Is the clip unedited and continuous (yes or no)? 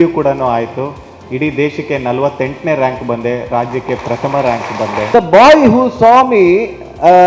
no